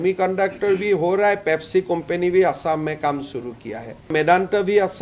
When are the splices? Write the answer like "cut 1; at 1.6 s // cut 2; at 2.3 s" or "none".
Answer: cut 1; at 4.1 s